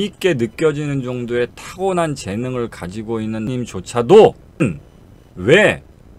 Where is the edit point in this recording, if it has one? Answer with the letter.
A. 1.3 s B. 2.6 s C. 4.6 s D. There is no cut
C